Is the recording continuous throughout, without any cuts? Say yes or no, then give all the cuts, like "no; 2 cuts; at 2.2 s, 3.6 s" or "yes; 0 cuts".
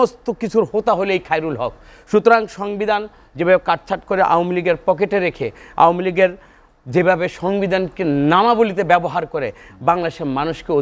yes; 0 cuts